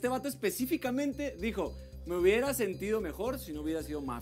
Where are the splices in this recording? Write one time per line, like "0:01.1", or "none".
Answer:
none